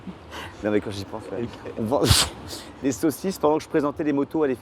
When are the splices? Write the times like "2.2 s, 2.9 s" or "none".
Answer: none